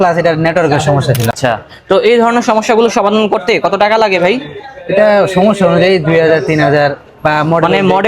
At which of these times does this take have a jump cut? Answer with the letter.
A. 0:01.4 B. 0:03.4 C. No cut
A